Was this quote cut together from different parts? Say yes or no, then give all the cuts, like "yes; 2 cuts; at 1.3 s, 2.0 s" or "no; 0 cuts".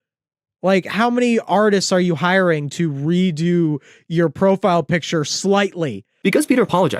yes; 1 cut; at 6.1 s